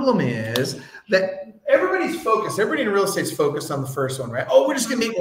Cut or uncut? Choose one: uncut